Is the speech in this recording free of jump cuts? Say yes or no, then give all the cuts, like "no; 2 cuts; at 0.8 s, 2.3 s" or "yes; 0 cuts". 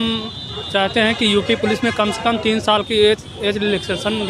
yes; 0 cuts